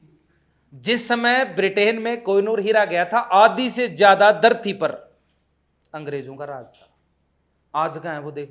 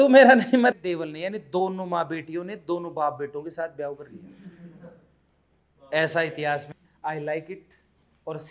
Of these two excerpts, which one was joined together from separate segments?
second; 2 cuts; at 0.7 s, 6.7 s

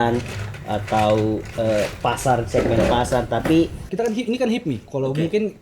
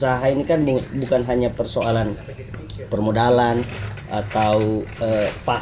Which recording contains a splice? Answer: first; 1 cut; at 3.8 s

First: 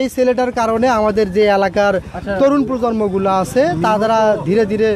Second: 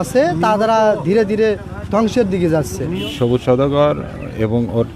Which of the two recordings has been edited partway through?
second; 1 cut; at 2.9 s

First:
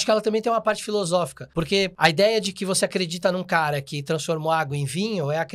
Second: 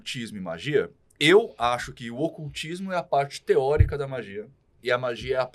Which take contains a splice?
first; 1 cut; at 1.8 s

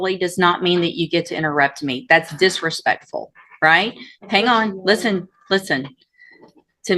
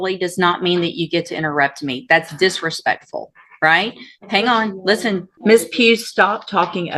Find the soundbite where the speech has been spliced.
second; 1 cut; at 5.3 s

